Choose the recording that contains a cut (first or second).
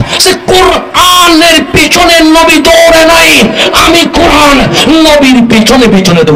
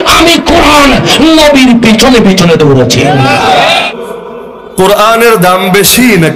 second